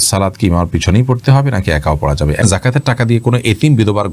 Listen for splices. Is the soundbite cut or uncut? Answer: cut